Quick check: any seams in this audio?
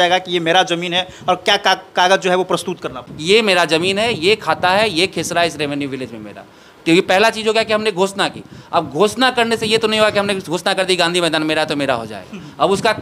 yes; 1 cut; at 3.1 s

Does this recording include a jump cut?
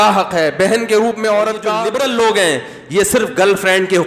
yes; 1 cut; at 1.8 s

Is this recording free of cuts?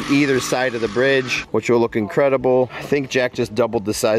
yes; 0 cuts

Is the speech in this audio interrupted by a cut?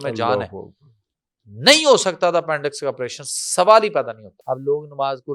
yes; 1 cut; at 4.3 s

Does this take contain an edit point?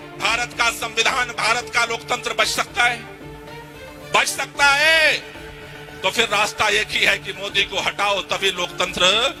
no; 0 cuts

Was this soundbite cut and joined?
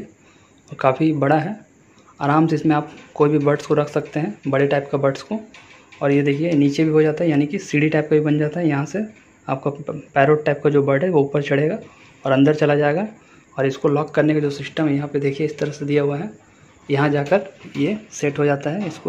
no; 0 cuts

